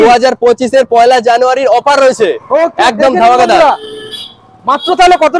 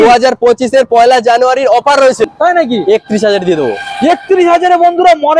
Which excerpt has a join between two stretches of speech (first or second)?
second